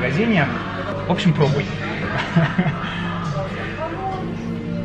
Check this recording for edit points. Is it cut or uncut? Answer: uncut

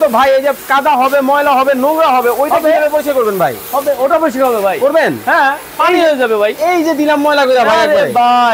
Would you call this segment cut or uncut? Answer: uncut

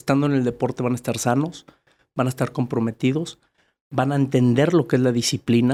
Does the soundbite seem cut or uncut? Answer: uncut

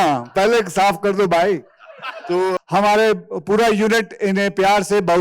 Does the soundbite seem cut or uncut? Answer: cut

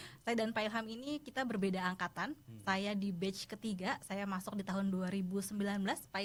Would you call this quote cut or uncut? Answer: uncut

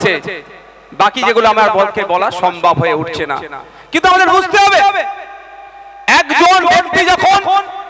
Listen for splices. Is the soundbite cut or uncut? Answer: uncut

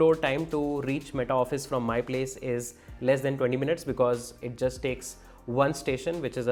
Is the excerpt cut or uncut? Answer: uncut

